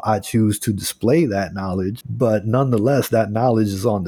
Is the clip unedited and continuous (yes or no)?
no